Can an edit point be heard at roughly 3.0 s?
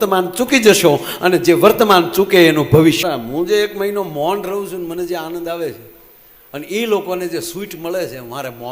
yes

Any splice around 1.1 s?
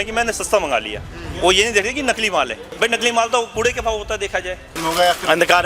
no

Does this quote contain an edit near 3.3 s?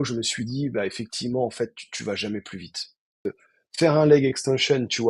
yes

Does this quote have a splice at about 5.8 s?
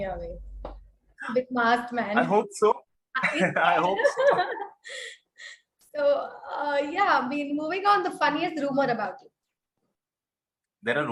no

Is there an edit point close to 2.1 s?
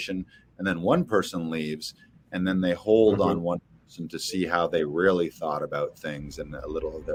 no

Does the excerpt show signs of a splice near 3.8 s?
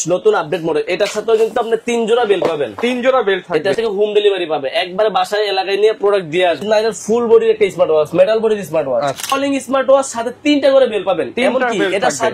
yes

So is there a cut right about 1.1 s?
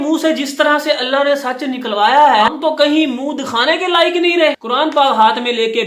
no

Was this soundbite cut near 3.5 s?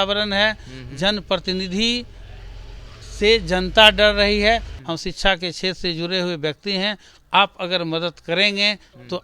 no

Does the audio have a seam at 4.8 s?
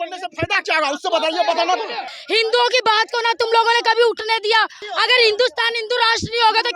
yes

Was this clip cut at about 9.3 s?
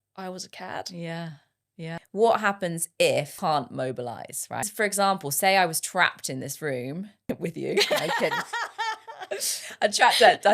no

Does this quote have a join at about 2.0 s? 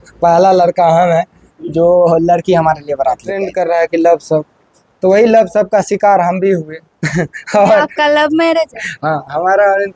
no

